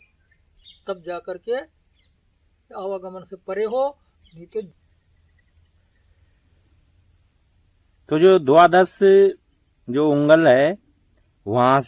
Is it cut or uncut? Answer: uncut